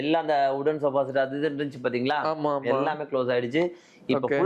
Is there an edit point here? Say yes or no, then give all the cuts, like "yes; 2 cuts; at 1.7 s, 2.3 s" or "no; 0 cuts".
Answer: no; 0 cuts